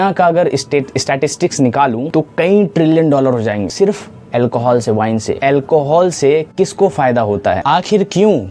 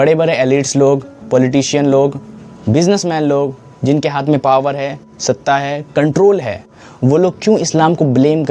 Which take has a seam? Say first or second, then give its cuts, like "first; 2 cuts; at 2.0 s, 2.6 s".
first; 4 cuts; at 2.1 s, 3.7 s, 5.4 s, 7.6 s